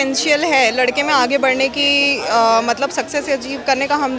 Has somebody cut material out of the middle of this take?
no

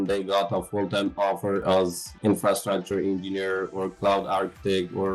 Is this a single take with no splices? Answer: yes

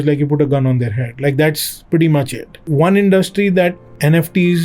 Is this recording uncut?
no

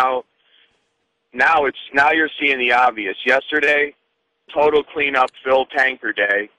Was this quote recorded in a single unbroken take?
yes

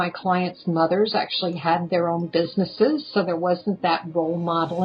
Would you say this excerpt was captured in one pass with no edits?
yes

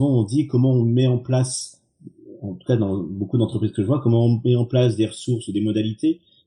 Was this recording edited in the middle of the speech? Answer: no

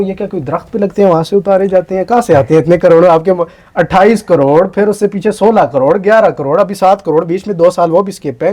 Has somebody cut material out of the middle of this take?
no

